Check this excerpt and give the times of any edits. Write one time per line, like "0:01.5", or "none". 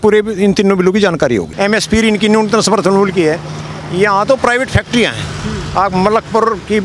0:01.5